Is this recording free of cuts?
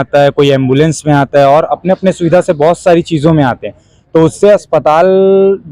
yes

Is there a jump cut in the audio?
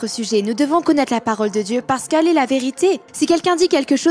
yes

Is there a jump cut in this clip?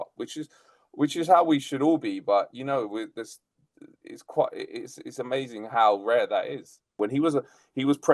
yes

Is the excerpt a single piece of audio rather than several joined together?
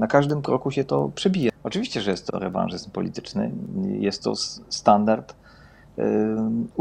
no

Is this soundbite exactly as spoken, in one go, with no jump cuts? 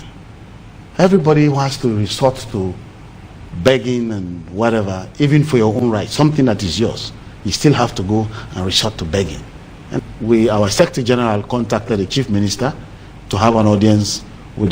no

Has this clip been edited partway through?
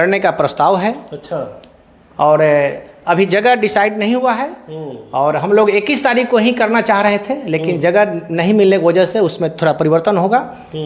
no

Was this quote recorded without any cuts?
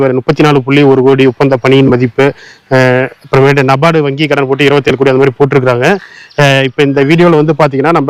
yes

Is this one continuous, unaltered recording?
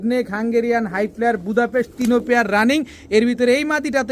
yes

